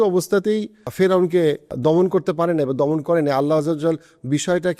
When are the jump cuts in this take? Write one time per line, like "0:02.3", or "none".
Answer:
0:00.9
0:01.7